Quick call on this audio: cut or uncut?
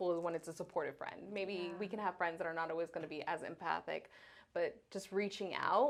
uncut